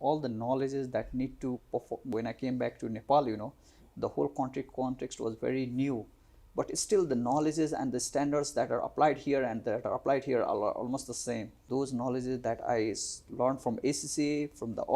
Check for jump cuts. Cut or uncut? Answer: cut